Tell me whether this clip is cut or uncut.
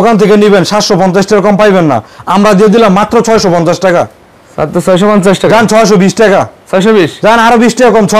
uncut